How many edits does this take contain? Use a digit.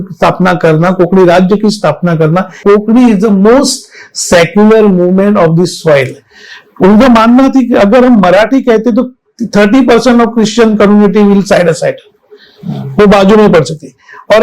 1